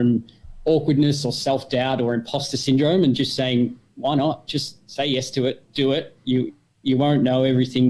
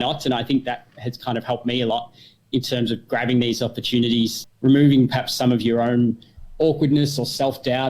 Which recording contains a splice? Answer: second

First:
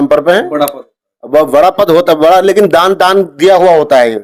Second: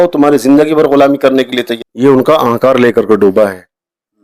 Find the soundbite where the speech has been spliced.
second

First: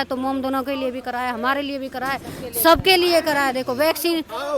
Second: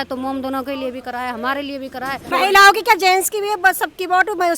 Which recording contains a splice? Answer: second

